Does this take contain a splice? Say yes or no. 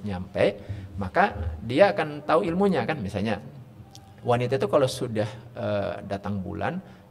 no